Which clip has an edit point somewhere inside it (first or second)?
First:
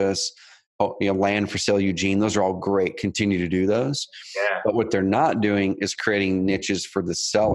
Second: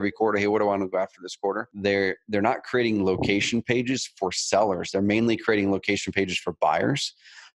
second